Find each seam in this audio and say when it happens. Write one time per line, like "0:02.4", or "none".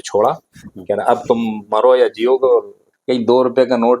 0:02.9